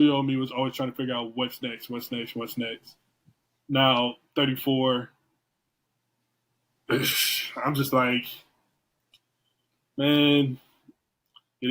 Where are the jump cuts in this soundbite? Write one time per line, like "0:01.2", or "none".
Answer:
none

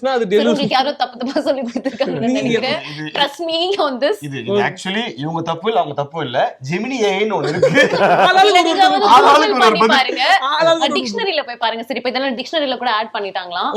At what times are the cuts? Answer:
none

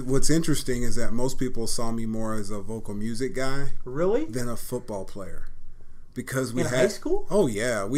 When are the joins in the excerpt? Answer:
none

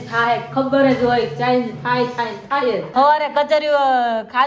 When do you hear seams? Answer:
0:02.9

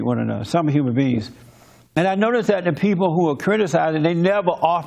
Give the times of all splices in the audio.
0:03.5

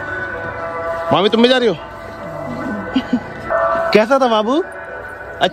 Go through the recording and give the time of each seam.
0:03.5

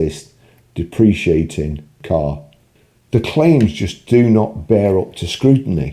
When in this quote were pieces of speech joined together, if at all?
0:02.0

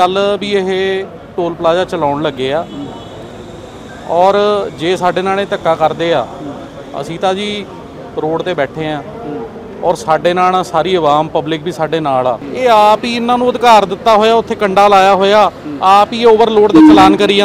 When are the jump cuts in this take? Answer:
0:12.5

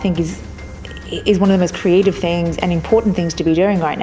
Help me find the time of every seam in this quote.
none

